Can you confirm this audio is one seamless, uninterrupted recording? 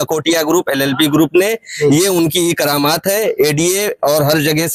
yes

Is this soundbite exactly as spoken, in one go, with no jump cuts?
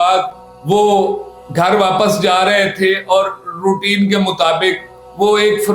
yes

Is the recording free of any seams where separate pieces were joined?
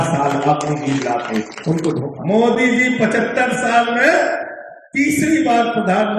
no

